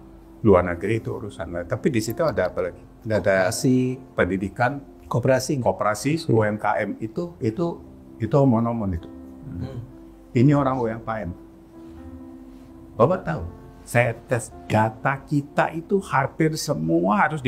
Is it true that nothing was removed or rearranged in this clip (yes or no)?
yes